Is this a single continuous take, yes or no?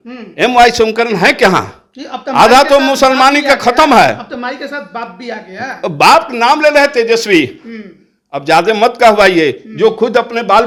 yes